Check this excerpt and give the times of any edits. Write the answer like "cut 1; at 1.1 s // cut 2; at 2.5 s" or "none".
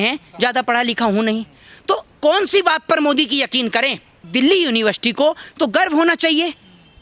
cut 1; at 4.3 s